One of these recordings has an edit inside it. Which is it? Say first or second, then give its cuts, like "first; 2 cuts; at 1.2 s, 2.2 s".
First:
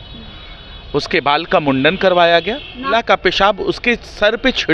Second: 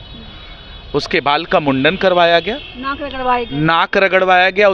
first; 1 cut; at 2.9 s